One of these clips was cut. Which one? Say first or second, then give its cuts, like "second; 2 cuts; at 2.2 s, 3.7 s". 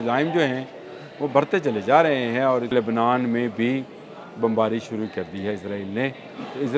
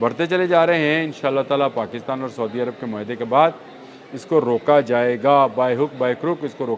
first; 1 cut; at 2.7 s